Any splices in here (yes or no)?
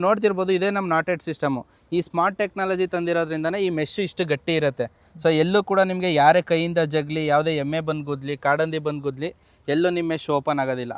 no